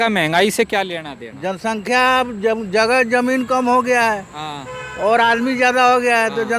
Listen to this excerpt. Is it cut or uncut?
uncut